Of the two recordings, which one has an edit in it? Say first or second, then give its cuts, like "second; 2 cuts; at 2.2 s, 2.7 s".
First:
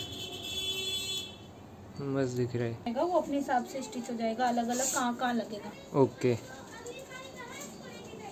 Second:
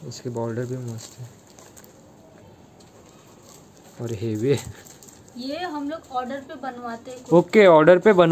first; 1 cut; at 2.9 s